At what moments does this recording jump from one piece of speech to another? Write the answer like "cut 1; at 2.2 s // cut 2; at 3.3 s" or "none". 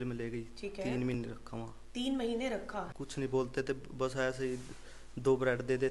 cut 1; at 2.9 s